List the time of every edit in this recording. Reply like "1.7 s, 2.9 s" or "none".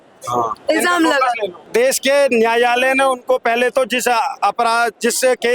1.6 s